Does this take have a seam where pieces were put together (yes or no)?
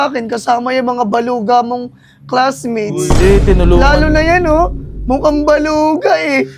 no